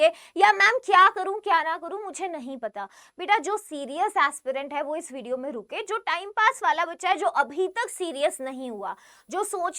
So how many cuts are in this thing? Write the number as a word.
zero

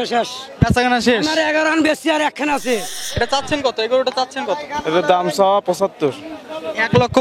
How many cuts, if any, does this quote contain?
one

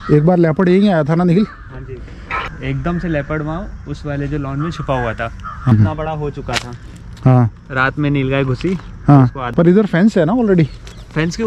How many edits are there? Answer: three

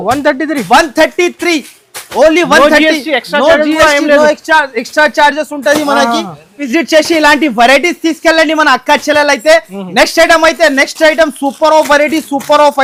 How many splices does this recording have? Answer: zero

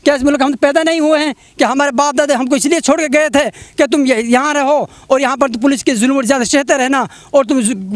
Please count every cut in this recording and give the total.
zero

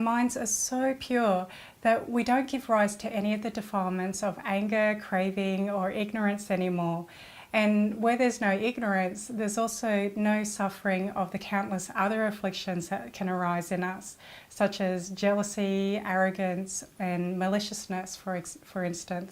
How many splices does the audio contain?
one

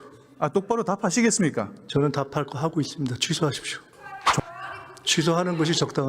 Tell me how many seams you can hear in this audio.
one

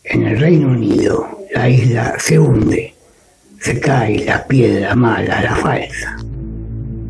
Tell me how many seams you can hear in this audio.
one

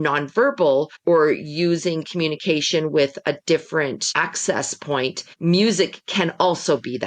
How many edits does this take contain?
three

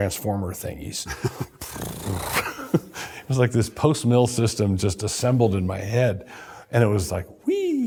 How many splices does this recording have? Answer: zero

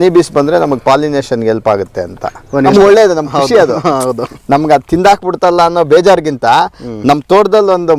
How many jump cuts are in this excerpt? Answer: one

